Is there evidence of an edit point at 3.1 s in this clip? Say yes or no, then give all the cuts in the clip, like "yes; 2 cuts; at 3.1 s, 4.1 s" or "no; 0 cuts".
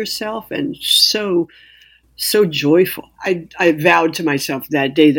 yes; 1 cut; at 3.1 s